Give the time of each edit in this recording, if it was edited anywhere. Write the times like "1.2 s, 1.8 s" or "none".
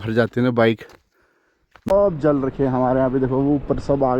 1.9 s